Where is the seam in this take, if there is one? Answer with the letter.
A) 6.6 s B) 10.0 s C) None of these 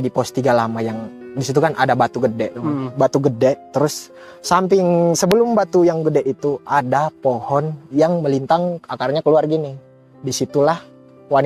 C